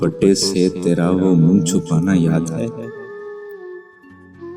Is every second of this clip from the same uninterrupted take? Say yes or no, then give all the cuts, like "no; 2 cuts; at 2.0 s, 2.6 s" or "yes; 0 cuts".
yes; 0 cuts